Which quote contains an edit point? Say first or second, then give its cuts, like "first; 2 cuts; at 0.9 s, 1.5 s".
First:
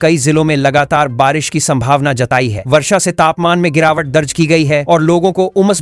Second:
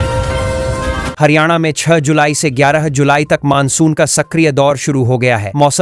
second; 1 cut; at 1.1 s